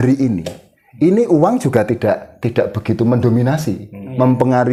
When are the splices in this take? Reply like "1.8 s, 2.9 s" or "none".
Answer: none